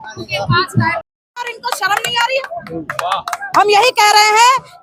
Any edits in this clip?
no; 0 cuts

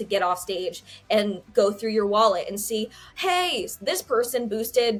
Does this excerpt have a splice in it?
no; 0 cuts

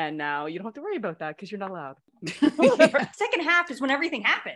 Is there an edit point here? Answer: yes; 2 cuts; at 2.1 s, 3.1 s

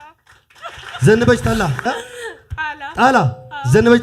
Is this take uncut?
no; 1 cut; at 1.8 s

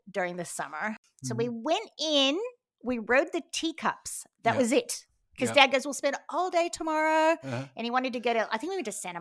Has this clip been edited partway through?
yes; 1 cut; at 1.0 s

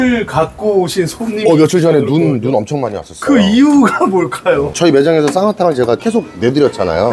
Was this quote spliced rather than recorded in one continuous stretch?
no; 0 cuts

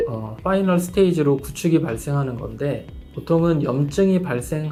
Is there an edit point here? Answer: no; 0 cuts

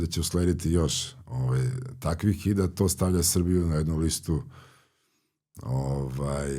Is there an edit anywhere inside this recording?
no; 0 cuts

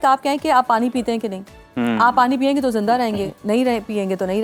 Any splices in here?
no; 0 cuts

